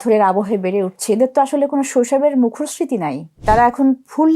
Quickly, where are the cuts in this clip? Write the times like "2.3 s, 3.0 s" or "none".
3.4 s